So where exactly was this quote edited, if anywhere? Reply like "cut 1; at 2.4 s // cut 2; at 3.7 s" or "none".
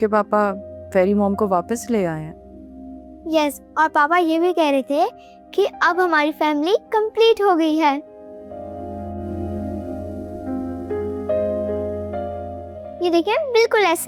none